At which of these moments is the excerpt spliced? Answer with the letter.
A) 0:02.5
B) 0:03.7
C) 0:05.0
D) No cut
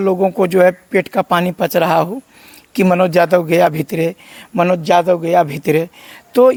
D